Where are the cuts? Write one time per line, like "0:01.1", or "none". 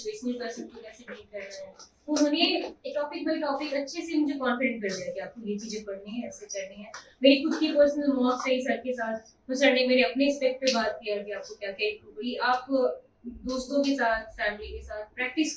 0:12.1